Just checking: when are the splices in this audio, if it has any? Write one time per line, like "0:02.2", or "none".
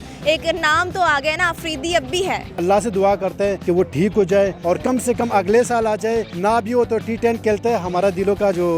0:02.5
0:03.6
0:04.6
0:06.3